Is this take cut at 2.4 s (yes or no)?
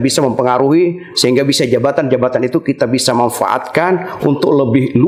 no